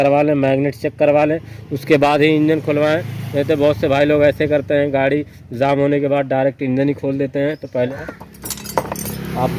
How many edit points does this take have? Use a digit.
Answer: 1